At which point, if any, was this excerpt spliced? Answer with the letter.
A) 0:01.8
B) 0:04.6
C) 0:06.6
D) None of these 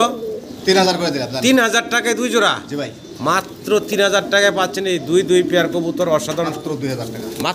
C